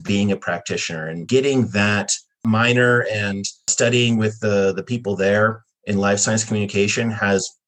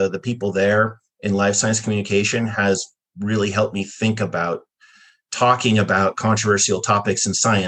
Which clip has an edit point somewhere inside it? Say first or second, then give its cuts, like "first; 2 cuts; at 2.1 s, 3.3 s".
first; 3 cuts; at 1.2 s, 2.4 s, 3.7 s